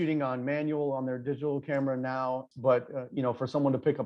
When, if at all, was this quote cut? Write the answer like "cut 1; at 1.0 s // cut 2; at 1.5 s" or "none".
cut 1; at 2.5 s